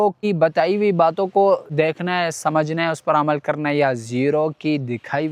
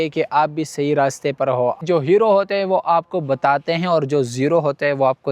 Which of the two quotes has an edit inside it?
second; 1 cut; at 1.8 s

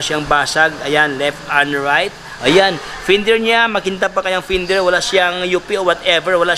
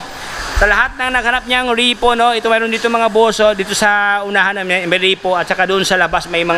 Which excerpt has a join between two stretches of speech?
first; 1 cut; at 2.2 s

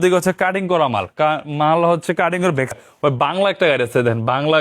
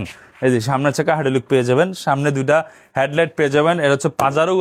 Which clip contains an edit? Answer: first; 1 cut; at 2.7 s

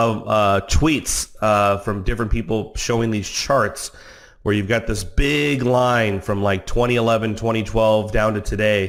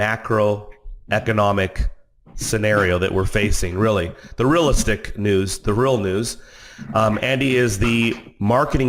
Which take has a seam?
second; 1 cut; at 4.9 s

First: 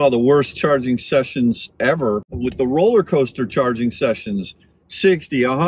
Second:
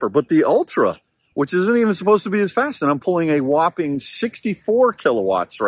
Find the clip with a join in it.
first; 1 cut; at 2.3 s

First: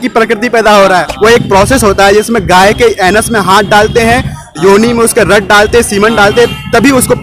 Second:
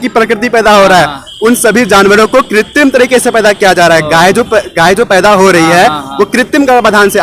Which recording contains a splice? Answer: first; 1 cut; at 1.1 s

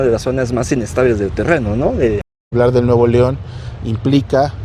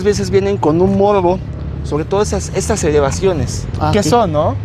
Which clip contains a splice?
first; 1 cut; at 2.4 s

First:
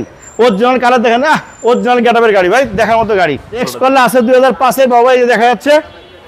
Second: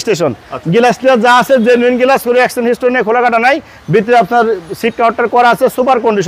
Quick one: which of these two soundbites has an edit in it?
first; 1 cut; at 3.7 s

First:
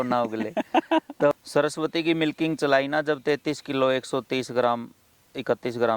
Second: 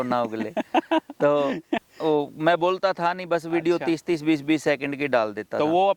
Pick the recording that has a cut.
first; 1 cut; at 1.3 s

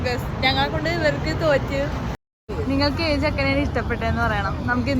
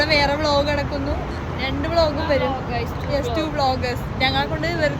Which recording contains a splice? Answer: first; 1 cut; at 2.3 s

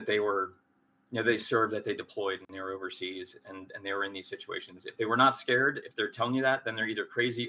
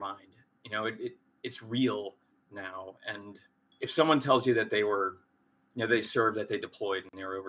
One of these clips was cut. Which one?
second; 1 cut; at 3.7 s

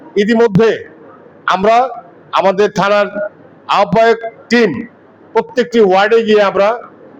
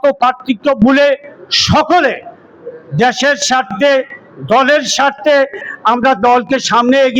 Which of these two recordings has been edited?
second; 1 cut; at 5.7 s

